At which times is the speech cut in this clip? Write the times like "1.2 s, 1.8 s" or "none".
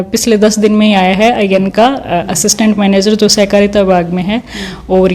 none